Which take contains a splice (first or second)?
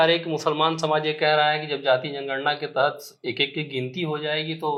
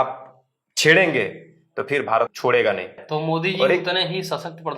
second